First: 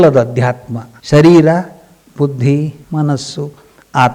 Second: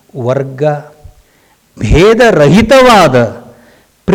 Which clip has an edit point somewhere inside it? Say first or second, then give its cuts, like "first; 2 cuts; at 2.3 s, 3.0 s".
first; 1 cut; at 2.8 s